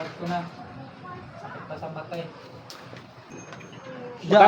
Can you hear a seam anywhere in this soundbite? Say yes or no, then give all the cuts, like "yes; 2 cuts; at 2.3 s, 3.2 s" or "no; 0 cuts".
yes; 1 cut; at 3.4 s